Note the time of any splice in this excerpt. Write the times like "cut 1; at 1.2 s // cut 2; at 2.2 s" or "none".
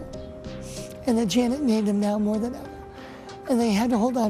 none